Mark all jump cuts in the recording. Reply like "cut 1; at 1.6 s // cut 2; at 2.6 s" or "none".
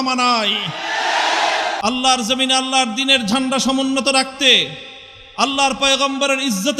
cut 1; at 1.8 s